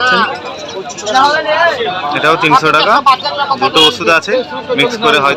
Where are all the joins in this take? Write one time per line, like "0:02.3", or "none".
none